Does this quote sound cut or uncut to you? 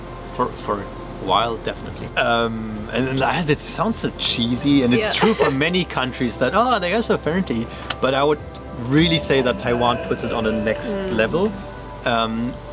uncut